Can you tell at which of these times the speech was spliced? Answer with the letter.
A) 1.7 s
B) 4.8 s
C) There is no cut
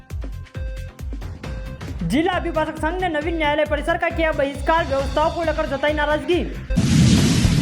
A